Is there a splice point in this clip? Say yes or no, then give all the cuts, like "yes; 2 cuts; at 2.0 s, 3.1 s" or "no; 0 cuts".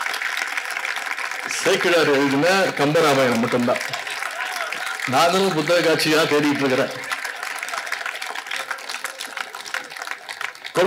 no; 0 cuts